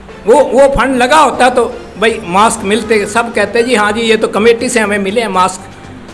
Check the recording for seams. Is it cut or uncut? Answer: uncut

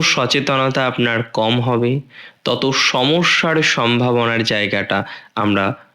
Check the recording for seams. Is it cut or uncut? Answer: uncut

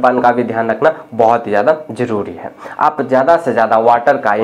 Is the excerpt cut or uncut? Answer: uncut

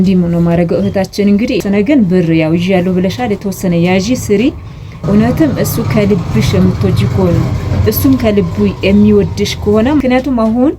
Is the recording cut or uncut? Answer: cut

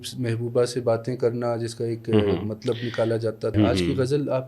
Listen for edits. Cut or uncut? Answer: cut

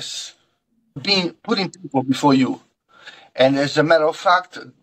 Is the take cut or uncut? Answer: cut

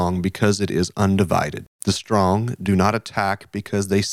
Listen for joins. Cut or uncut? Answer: cut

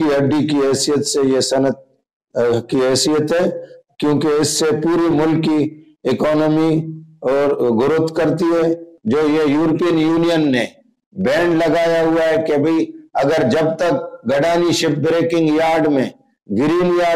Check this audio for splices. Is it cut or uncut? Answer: cut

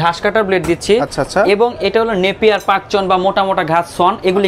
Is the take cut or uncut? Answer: uncut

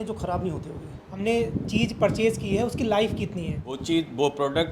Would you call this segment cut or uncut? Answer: cut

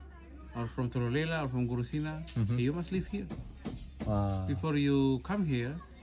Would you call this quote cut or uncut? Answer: uncut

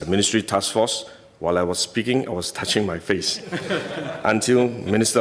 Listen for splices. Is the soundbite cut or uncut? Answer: uncut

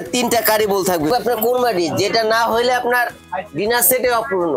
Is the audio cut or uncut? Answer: cut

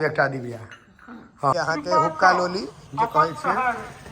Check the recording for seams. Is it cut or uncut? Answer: cut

